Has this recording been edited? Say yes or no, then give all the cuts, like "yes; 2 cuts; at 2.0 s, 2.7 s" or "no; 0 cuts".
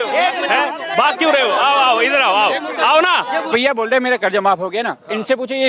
yes; 1 cut; at 3.5 s